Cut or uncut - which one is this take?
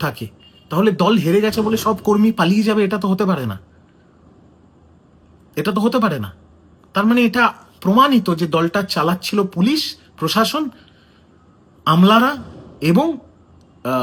uncut